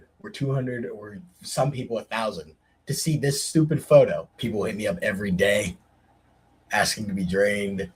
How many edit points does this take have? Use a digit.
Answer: 1